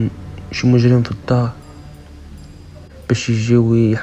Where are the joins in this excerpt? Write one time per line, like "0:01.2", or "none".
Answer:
none